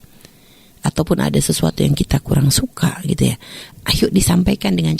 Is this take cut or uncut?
cut